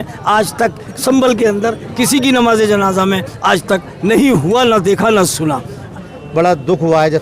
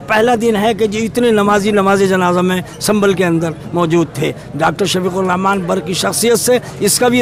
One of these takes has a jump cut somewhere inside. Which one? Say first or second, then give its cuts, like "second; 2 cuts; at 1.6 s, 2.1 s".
first; 1 cut; at 5.8 s